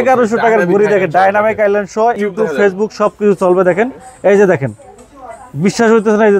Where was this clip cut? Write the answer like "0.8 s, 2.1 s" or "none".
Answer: 2.2 s